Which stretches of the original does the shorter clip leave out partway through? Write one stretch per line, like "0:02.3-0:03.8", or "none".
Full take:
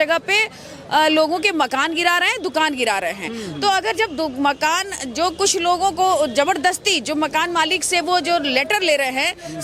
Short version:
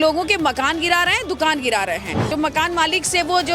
0:03.4-0:07.1